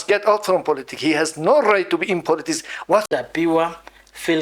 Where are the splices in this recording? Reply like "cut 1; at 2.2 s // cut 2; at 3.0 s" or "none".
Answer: cut 1; at 3.1 s